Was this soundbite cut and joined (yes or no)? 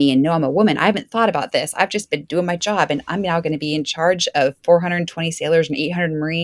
no